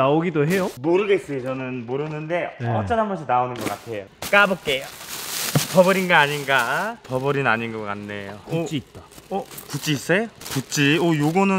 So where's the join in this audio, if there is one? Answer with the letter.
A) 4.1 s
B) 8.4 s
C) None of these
A